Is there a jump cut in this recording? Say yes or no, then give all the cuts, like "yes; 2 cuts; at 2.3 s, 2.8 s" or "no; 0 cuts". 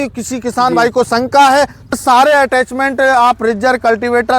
yes; 1 cut; at 1.9 s